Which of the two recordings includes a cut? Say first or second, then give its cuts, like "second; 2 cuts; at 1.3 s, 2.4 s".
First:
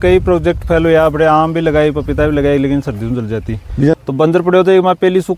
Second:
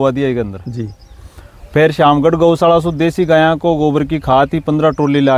first; 1 cut; at 4.0 s